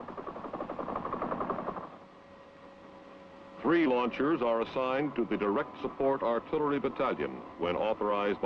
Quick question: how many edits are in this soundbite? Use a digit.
1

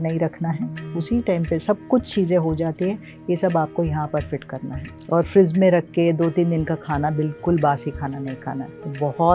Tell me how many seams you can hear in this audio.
1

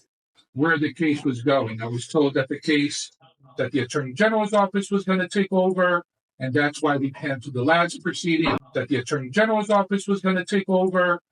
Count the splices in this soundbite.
1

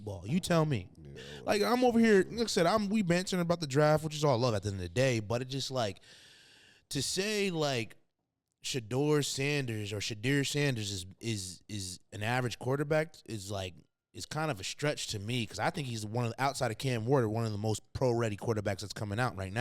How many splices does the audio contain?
1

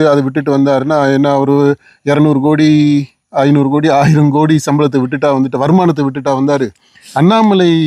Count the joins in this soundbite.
1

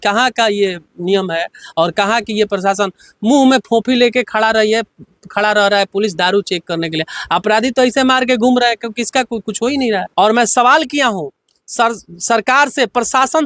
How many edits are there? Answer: 1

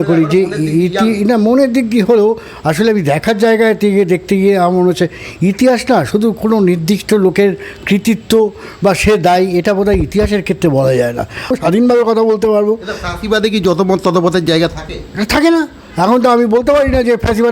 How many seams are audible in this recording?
1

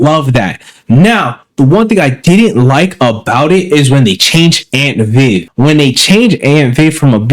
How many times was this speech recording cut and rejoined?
1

